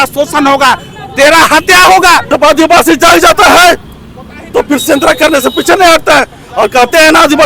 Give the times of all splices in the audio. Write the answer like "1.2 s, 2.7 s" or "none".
2.3 s